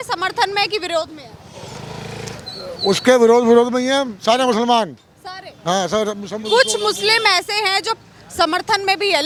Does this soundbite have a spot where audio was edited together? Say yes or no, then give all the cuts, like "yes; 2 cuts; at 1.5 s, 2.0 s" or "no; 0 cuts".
no; 0 cuts